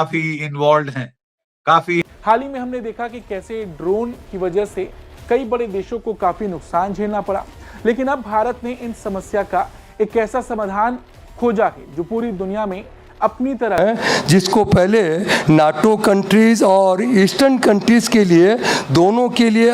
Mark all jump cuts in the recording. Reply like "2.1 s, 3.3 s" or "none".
2.1 s, 13.8 s